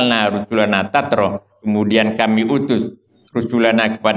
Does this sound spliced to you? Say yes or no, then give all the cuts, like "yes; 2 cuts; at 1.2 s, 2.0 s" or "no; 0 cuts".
no; 0 cuts